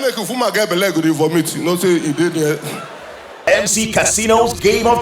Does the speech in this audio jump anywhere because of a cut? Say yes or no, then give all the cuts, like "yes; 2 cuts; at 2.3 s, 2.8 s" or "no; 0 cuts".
yes; 1 cut; at 3.4 s